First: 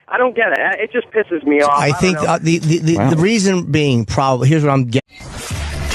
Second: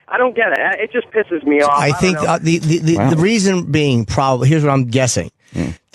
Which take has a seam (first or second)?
second